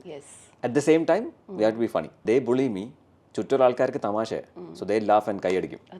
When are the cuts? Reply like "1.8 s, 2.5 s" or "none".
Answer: 2.2 s